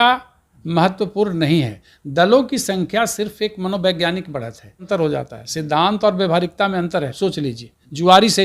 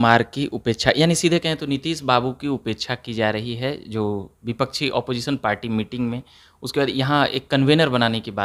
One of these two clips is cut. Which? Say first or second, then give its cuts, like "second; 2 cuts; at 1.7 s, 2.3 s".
first; 2 cuts; at 4.8 s, 7.1 s